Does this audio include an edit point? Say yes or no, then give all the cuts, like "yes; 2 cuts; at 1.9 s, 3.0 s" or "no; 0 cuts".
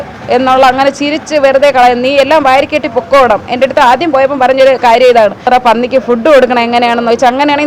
yes; 1 cut; at 5.4 s